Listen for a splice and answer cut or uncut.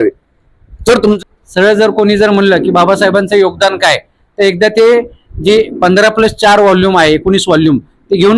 cut